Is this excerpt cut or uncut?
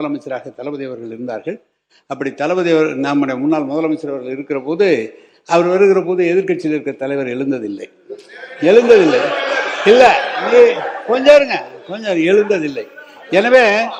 uncut